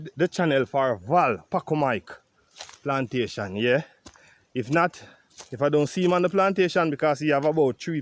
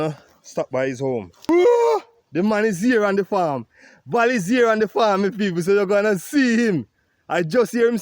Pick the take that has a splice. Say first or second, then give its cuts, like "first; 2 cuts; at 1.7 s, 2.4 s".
second; 1 cut; at 1.5 s